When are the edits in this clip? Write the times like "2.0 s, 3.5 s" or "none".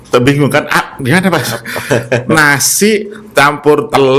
none